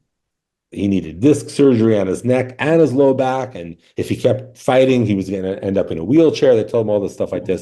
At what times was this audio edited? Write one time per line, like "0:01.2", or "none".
none